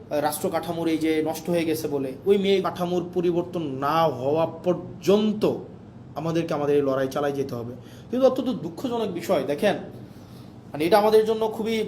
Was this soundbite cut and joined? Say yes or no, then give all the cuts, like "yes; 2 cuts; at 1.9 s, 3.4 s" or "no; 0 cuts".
yes; 1 cut; at 2.6 s